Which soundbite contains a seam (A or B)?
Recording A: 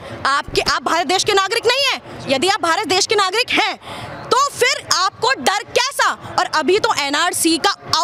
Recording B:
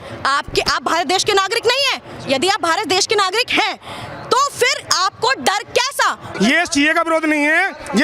B